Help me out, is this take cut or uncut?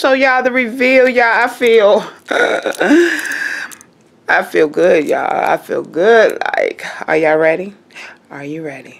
uncut